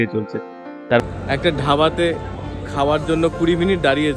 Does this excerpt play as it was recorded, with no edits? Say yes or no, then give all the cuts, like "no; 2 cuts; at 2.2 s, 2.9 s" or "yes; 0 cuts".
no; 1 cut; at 1.0 s